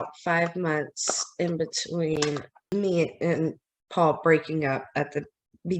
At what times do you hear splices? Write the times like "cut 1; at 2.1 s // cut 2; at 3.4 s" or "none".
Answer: cut 1; at 2.5 s